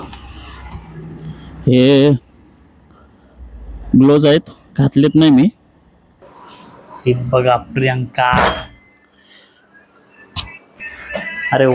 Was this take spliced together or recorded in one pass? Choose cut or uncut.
cut